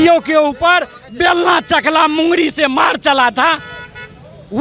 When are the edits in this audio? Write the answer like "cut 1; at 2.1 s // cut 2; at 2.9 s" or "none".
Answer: none